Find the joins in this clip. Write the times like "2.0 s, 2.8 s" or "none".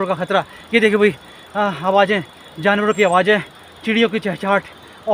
none